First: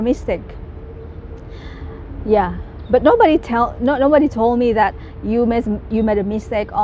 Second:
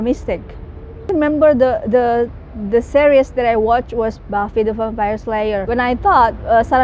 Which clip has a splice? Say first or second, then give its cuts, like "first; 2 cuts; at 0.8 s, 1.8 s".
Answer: second; 2 cuts; at 1.1 s, 5.6 s